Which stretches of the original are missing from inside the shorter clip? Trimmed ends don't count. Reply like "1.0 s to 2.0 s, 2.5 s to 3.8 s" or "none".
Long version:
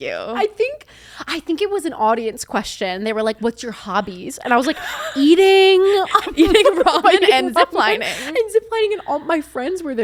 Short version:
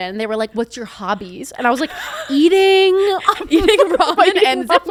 none